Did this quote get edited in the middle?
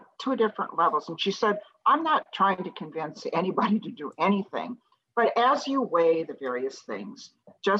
no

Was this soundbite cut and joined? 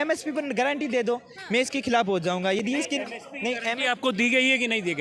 no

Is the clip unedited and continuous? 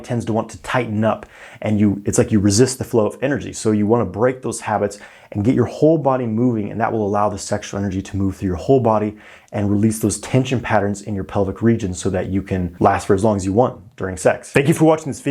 yes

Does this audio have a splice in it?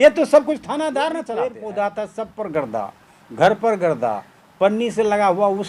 yes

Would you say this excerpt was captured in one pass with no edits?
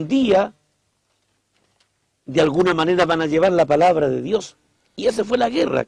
yes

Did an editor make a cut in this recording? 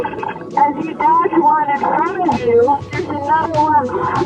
yes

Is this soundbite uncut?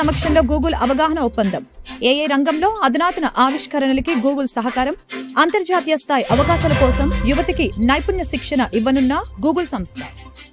yes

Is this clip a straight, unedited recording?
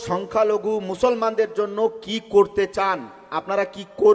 yes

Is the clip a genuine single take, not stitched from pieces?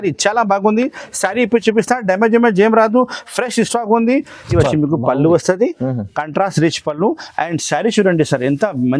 no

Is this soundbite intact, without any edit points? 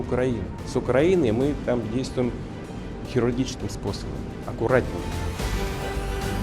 no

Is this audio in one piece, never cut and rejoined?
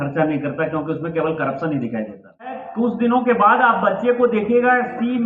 no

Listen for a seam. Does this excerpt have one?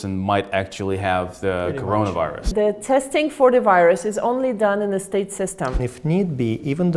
yes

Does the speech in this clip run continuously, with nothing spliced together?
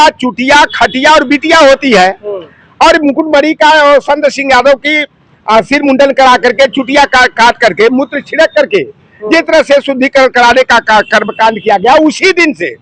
yes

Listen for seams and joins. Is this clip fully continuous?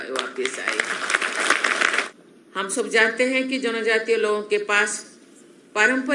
no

